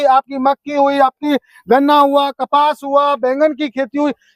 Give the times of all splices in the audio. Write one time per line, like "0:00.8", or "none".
none